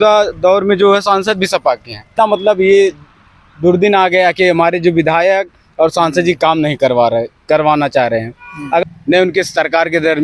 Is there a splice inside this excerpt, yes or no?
yes